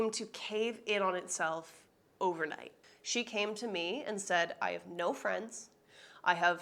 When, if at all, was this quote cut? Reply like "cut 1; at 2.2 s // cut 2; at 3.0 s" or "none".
cut 1; at 2.7 s